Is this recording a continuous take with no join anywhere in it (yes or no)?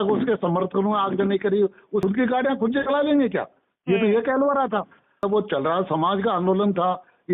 no